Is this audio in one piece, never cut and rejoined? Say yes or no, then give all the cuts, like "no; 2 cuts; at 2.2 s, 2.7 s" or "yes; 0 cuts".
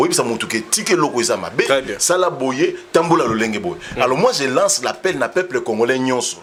yes; 0 cuts